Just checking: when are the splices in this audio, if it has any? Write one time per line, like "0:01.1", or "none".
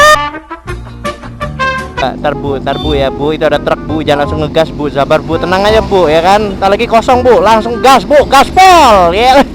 0:02.0